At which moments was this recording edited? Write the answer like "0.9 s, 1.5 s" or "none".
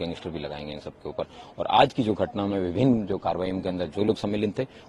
none